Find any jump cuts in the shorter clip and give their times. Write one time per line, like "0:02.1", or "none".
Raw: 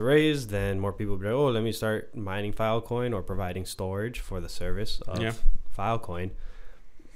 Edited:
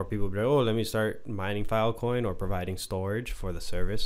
none